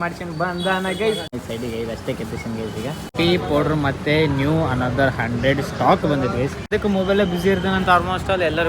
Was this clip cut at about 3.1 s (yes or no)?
yes